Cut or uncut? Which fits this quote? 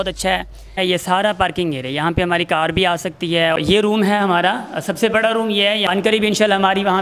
cut